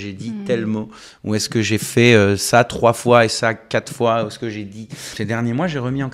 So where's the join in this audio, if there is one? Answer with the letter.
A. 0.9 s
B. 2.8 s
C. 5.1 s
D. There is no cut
C